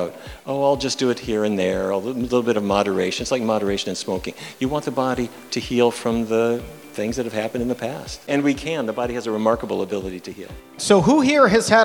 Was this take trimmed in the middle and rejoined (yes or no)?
yes